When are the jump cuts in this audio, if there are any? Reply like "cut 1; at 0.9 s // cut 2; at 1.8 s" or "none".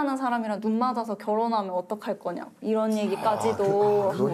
none